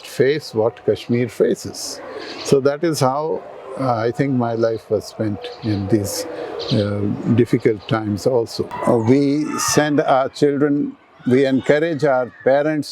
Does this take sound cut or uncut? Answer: cut